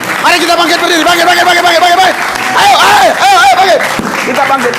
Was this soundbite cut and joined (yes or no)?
no